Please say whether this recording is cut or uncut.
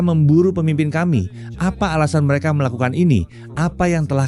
cut